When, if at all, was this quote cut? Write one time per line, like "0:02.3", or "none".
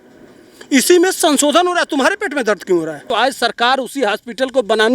0:03.1